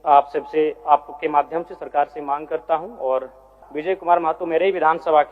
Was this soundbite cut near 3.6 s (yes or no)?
yes